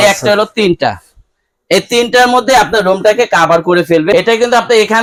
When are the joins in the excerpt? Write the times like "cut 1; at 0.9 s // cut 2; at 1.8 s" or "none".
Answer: none